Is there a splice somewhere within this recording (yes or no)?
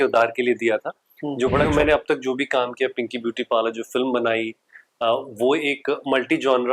yes